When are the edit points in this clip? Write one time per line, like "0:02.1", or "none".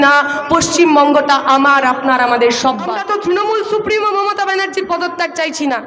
0:02.8